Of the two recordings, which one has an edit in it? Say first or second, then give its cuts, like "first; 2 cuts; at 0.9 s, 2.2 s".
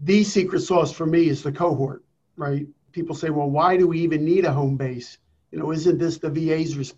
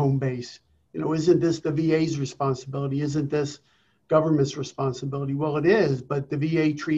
first; 1 cut; at 2.7 s